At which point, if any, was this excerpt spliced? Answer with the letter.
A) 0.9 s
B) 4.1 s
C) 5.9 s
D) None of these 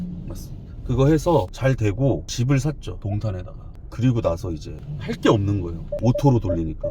C